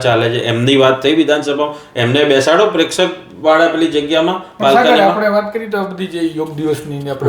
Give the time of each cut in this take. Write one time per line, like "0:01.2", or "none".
none